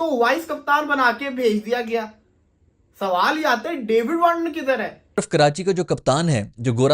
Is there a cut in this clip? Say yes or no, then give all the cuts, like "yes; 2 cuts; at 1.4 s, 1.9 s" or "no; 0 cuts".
yes; 1 cut; at 5.2 s